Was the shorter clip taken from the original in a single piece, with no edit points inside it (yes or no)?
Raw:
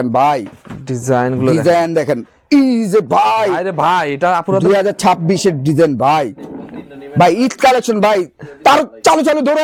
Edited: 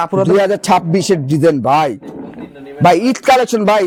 yes